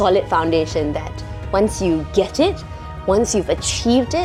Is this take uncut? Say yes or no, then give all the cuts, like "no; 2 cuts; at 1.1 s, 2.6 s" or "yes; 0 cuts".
yes; 0 cuts